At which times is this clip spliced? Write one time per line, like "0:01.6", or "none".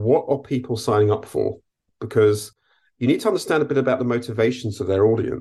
none